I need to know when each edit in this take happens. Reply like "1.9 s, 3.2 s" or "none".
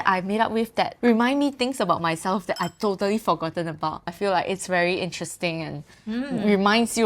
0.9 s, 4.1 s